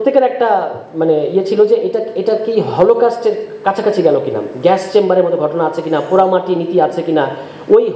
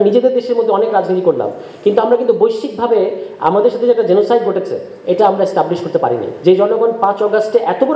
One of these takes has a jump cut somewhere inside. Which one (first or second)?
second